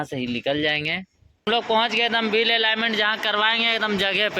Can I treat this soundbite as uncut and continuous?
no; 1 cut; at 1.4 s

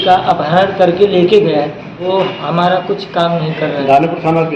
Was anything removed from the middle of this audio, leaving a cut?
yes; 1 cut; at 1.9 s

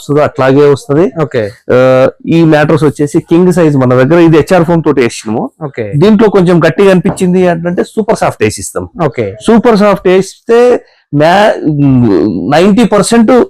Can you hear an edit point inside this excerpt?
no; 0 cuts

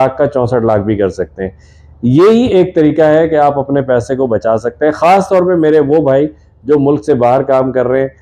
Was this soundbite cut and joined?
no; 0 cuts

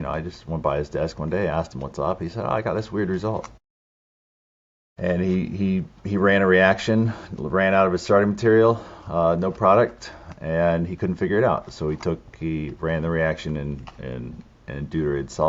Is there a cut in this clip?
no; 0 cuts

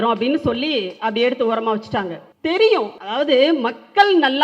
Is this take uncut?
no; 2 cuts; at 2.2 s, 3.0 s

